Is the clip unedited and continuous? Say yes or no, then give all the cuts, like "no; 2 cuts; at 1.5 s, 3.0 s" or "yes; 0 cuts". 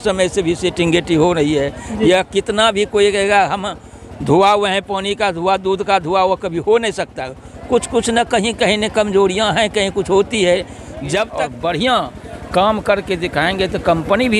no; 1 cut; at 11.4 s